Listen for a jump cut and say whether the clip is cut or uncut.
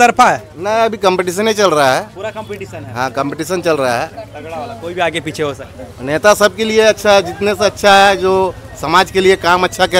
uncut